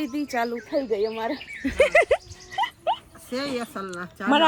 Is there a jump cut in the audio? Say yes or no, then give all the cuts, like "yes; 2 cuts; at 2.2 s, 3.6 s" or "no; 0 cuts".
no; 0 cuts